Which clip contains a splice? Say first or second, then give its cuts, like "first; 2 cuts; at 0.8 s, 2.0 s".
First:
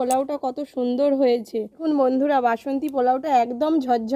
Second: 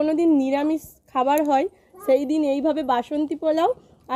first; 1 cut; at 1.8 s